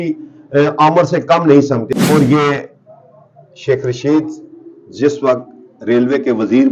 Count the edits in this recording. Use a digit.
1